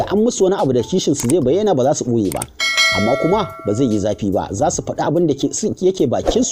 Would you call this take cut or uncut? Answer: uncut